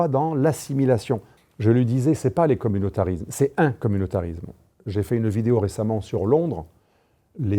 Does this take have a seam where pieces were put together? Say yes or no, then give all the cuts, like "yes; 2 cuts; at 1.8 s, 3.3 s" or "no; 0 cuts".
yes; 1 cut; at 1.3 s